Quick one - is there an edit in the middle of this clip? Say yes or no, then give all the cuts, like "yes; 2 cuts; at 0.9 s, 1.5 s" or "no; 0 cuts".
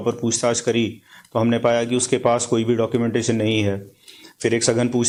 no; 0 cuts